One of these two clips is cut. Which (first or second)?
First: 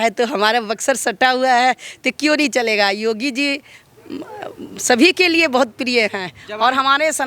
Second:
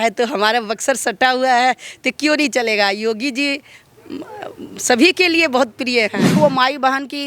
second